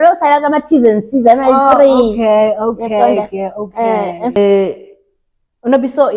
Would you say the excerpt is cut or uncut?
cut